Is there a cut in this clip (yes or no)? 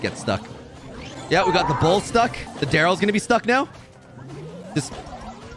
yes